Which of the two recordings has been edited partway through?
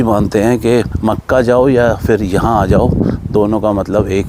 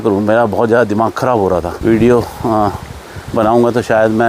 second; 1 cut; at 1.7 s

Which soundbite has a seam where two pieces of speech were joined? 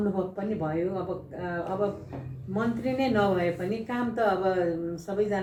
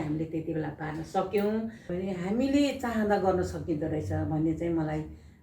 second; 1 cut; at 1.9 s

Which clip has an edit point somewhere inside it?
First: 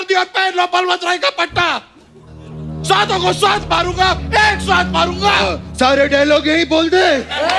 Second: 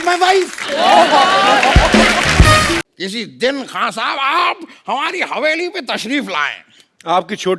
second; 1 cut; at 2.8 s

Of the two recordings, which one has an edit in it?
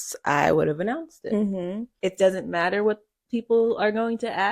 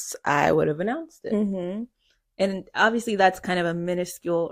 first; 1 cut; at 1.9 s

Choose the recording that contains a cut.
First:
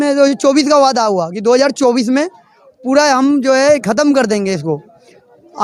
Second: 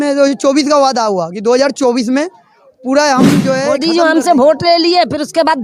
second; 1 cut; at 3.8 s

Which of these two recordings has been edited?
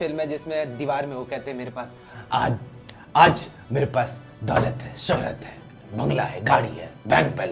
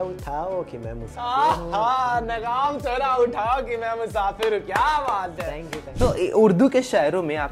second; 1 cut; at 5.8 s

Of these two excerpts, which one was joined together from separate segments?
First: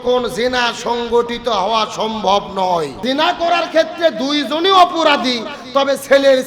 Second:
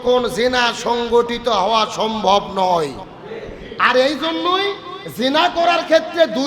first; 1 cut; at 2.9 s

